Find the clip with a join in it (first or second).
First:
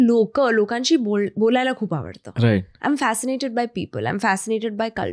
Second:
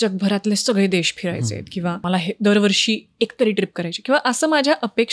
second